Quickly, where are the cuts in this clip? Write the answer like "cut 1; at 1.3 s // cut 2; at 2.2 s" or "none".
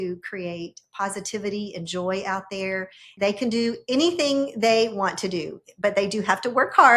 cut 1; at 3.1 s